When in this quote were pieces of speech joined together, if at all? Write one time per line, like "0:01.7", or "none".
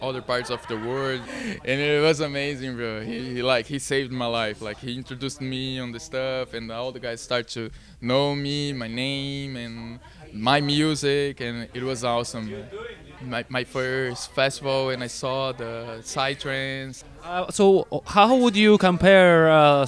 0:01.3
0:13.2
0:17.0